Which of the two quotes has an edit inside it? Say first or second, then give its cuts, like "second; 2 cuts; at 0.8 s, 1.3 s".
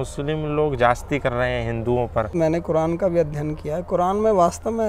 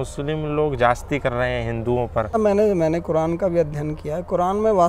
first; 1 cut; at 2.3 s